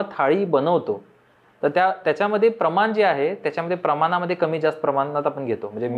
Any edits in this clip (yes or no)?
no